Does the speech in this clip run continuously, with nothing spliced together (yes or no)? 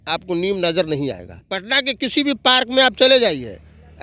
no